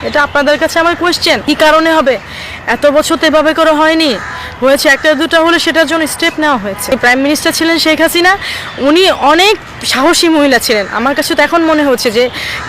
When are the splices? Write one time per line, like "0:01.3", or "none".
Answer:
0:01.4
0:06.9